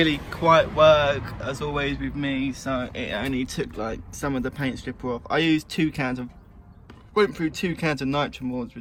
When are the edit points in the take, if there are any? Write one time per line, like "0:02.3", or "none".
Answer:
none